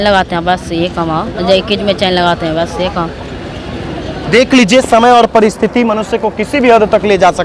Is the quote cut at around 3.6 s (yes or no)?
no